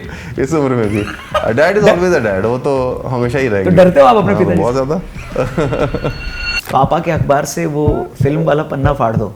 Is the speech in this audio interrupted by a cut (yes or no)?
yes